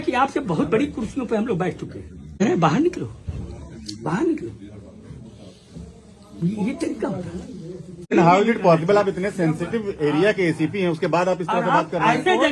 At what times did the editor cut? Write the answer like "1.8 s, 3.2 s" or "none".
2.4 s, 8.1 s